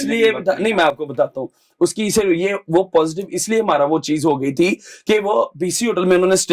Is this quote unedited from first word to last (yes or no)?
yes